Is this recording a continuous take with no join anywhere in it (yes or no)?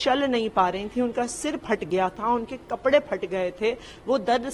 yes